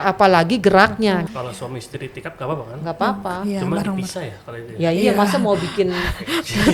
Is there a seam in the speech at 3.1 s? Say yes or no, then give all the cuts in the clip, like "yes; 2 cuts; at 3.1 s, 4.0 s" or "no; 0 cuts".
no; 1 cut; at 1.3 s